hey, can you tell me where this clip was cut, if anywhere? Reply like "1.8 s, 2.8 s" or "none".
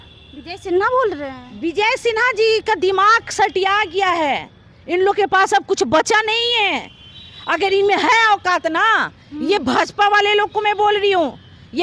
none